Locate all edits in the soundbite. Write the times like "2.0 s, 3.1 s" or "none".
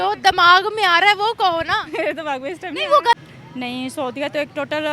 3.1 s